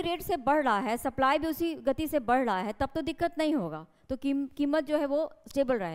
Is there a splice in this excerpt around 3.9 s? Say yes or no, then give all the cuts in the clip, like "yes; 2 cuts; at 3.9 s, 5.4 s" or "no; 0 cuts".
no; 0 cuts